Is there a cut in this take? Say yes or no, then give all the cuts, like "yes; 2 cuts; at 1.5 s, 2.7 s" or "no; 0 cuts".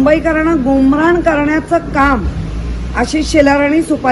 no; 0 cuts